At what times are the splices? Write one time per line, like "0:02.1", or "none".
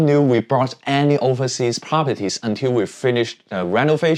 none

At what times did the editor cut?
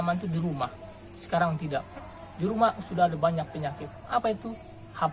none

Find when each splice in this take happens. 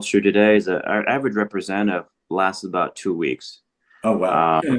none

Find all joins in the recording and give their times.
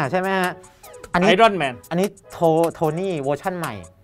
0:01.9

